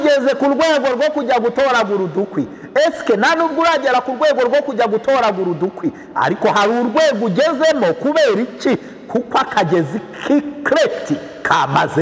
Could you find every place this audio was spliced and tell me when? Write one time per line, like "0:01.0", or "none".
none